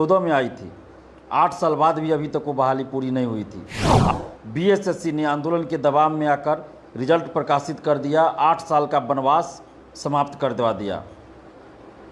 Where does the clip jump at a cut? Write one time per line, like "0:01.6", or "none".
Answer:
0:04.1